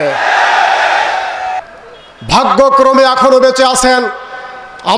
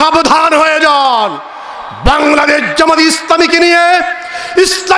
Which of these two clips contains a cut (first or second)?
first